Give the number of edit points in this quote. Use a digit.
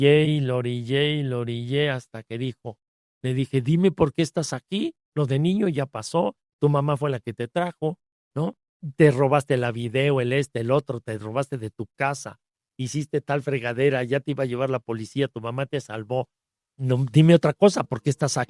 0